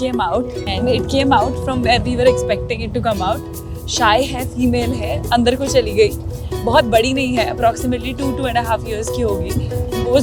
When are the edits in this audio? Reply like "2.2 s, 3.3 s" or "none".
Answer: none